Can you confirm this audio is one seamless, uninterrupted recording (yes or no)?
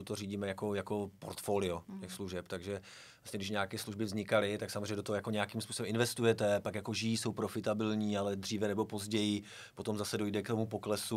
yes